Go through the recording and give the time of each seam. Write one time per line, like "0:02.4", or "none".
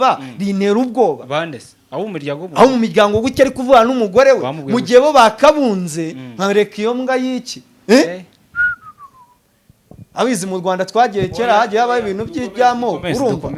none